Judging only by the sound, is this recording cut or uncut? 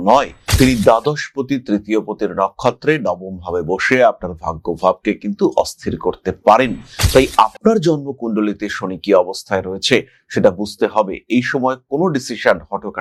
uncut